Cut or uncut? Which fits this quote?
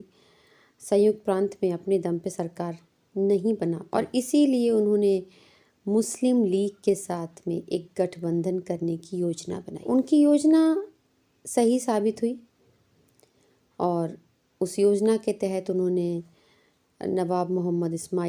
cut